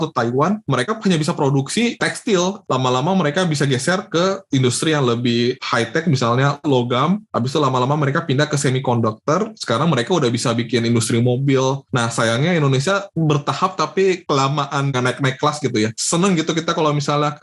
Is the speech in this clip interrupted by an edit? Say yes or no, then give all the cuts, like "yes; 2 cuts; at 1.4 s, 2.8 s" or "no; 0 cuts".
yes; 4 cuts; at 2.6 s, 11.8 s, 14.9 s, 16.0 s